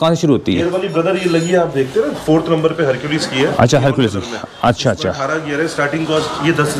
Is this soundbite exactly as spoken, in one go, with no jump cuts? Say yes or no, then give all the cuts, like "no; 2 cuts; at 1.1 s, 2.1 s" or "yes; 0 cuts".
yes; 0 cuts